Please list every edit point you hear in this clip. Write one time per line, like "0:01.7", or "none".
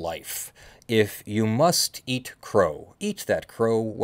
0:02.9

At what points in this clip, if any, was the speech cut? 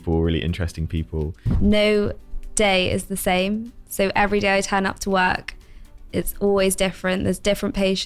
0:01.4

